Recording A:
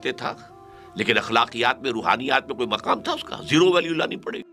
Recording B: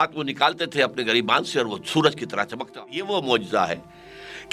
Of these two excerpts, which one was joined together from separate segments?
B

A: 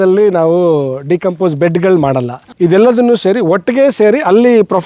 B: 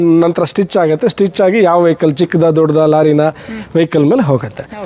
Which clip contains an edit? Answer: A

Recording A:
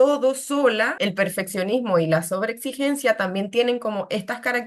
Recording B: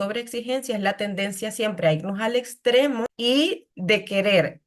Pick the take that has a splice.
A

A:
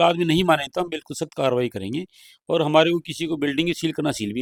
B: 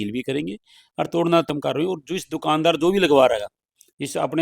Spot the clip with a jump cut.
B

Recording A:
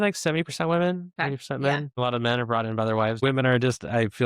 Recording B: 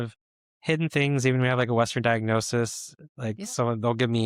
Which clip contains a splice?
A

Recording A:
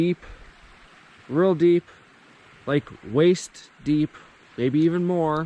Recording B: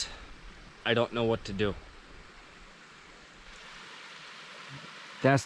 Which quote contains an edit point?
B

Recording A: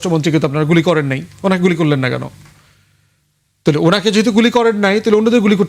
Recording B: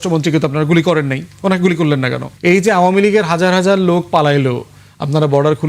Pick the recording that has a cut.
B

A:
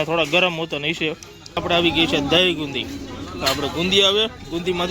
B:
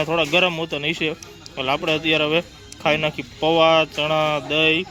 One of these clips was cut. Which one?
A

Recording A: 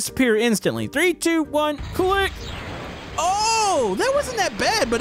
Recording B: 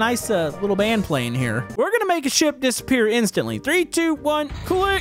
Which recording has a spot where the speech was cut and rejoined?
B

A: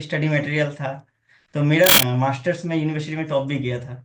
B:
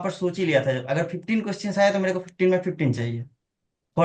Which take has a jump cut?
A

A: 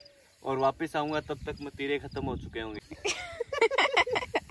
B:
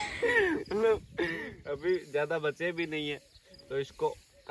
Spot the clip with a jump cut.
A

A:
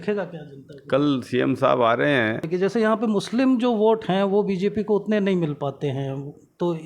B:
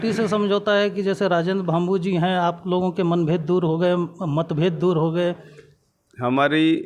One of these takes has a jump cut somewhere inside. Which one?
A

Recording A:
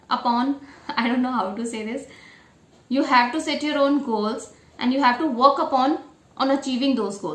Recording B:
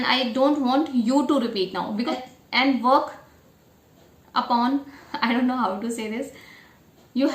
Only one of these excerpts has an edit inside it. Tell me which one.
B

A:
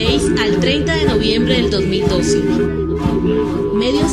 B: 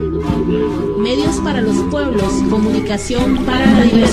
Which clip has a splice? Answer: A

